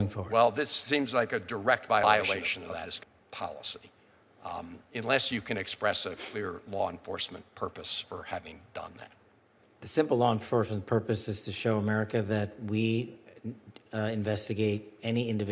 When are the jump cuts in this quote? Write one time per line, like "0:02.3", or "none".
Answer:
0:02.0